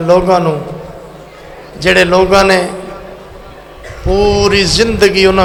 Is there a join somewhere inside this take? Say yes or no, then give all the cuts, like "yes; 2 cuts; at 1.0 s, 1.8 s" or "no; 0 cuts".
no; 0 cuts